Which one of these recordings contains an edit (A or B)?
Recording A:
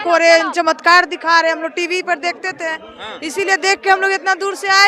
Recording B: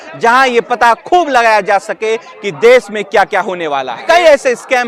B